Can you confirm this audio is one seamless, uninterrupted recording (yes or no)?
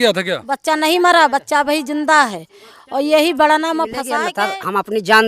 no